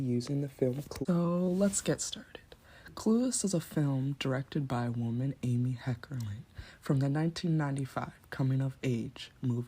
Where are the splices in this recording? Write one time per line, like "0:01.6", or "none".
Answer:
0:00.9

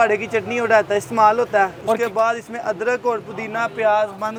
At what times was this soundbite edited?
none

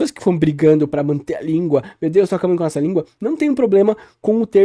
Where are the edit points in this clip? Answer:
none

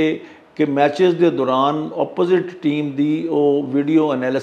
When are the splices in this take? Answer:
none

